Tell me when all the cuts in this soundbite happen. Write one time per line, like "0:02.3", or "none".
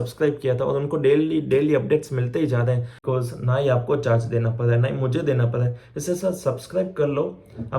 0:03.0